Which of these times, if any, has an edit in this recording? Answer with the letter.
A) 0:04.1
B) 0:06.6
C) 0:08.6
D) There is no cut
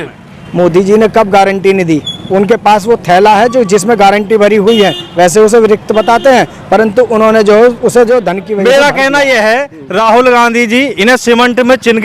C